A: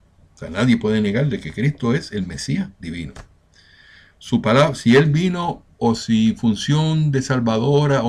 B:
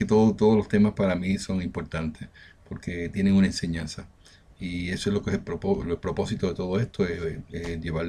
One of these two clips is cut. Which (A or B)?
A